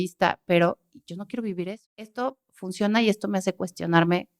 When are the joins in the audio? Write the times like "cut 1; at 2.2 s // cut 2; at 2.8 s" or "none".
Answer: cut 1; at 2.1 s